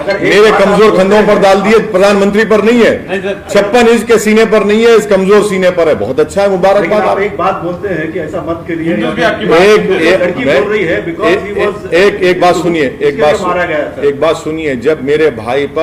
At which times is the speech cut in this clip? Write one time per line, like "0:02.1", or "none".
none